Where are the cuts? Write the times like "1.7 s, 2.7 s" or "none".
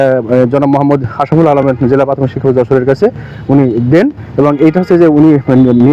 none

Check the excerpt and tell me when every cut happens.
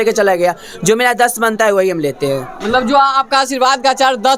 none

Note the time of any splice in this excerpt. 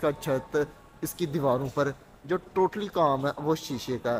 none

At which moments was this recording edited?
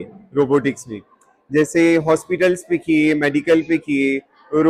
none

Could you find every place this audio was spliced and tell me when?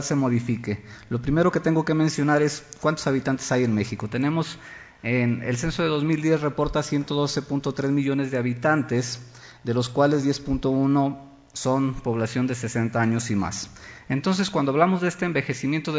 none

